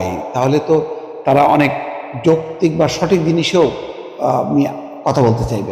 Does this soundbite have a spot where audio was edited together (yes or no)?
no